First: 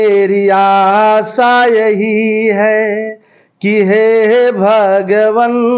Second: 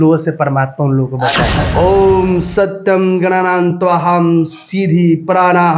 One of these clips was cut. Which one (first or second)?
second